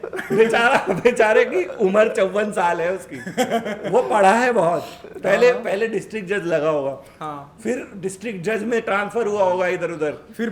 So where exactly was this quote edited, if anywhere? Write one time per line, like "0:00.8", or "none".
none